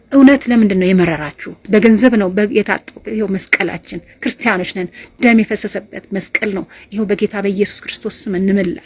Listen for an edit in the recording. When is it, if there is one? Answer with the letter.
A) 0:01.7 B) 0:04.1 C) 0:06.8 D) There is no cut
A